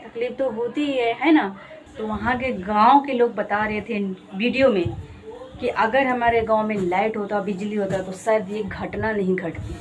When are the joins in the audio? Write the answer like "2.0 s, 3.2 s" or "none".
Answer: 1.8 s